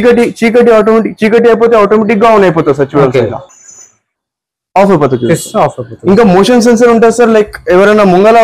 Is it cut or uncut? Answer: uncut